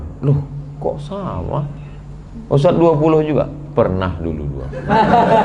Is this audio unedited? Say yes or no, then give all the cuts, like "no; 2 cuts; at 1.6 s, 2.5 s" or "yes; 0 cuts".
yes; 0 cuts